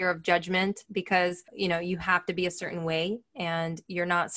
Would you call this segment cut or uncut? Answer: cut